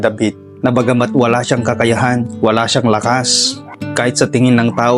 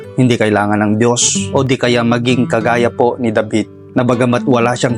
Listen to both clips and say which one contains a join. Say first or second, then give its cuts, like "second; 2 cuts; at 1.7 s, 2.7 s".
second; 1 cut; at 1.3 s